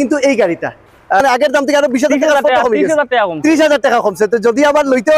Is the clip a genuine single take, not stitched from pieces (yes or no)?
no